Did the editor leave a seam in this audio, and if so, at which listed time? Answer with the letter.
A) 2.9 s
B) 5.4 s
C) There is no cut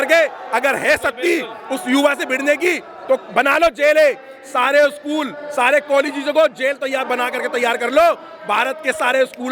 C